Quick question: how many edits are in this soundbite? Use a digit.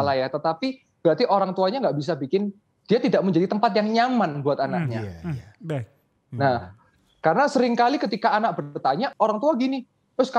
1